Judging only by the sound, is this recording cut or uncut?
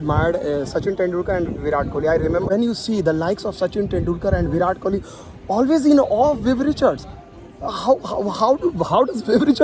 cut